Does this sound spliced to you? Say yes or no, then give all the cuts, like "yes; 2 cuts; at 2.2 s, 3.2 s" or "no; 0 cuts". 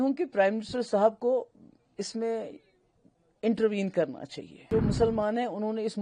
yes; 1 cut; at 4.7 s